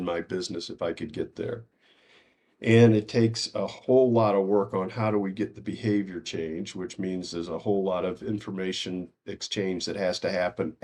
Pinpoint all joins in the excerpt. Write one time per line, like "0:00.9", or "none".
none